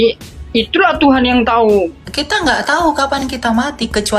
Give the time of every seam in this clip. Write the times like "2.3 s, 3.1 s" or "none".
2.0 s